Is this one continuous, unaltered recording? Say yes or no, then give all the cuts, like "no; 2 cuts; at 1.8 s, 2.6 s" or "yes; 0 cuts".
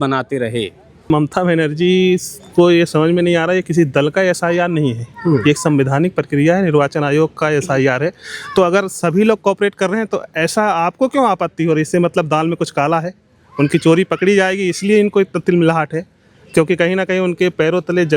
no; 1 cut; at 1.1 s